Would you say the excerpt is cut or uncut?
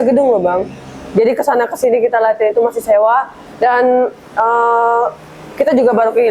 uncut